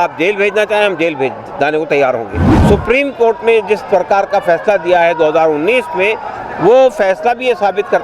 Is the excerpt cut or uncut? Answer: cut